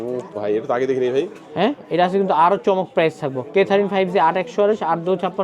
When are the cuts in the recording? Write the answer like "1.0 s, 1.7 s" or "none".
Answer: none